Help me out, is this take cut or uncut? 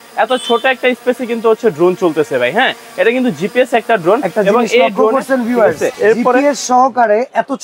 cut